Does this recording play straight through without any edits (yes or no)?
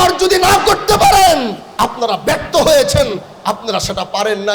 no